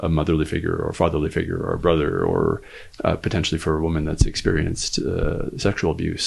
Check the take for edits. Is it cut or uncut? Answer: cut